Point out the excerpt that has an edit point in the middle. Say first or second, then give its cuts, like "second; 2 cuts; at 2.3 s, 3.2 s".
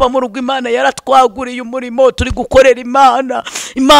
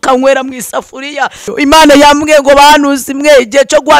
second; 1 cut; at 1.5 s